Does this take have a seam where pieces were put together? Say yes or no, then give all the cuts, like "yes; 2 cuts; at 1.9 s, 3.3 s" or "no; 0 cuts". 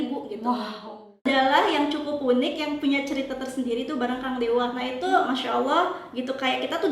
yes; 2 cuts; at 1.2 s, 4.8 s